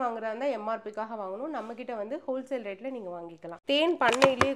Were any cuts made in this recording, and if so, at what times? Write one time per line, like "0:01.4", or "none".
0:03.6